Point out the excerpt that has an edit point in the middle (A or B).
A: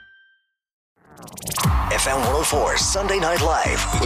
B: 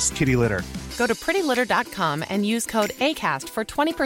A